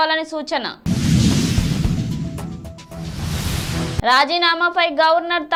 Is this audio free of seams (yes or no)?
yes